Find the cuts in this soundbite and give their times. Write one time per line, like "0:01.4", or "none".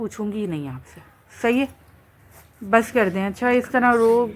none